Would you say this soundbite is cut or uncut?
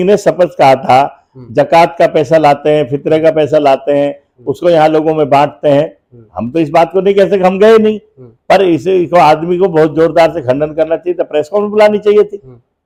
uncut